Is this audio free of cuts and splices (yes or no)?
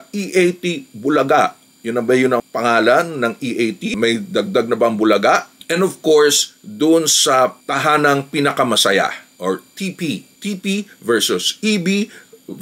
yes